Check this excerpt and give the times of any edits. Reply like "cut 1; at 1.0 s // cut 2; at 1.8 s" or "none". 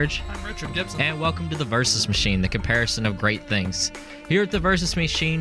none